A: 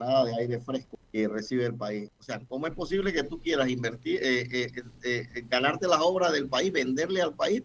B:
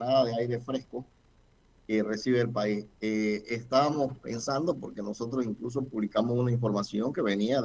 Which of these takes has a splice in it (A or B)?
A